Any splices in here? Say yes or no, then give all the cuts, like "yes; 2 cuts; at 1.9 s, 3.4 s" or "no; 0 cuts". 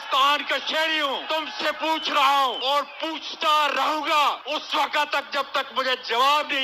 yes; 3 cuts; at 1.2 s, 2.6 s, 4.4 s